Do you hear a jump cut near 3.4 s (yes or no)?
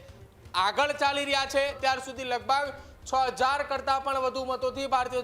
no